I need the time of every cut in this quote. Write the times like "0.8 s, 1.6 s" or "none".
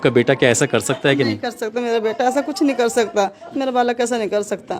3.4 s